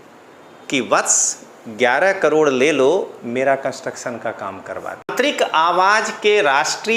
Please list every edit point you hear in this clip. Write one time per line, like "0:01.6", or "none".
0:05.1